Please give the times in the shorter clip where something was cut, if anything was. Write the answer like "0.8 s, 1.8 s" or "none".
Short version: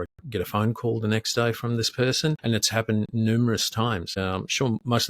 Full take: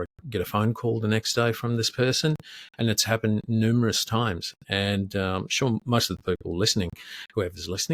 2.4 s, 4.1 s